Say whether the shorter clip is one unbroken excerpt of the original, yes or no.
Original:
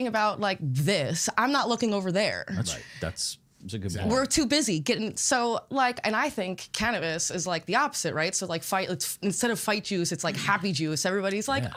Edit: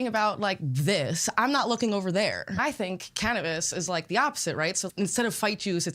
no